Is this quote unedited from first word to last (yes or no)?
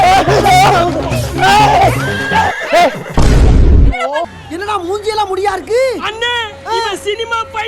no